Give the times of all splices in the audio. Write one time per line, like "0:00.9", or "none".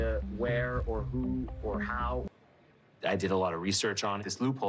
0:02.4